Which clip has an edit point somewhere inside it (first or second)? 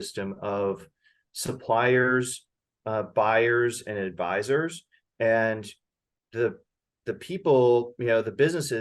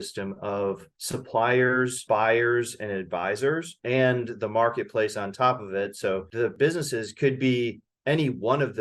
second